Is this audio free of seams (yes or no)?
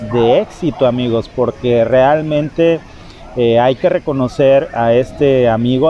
yes